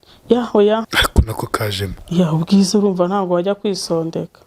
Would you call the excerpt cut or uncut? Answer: cut